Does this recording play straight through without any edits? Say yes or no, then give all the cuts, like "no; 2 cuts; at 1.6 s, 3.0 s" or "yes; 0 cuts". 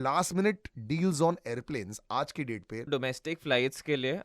no; 1 cut; at 2.9 s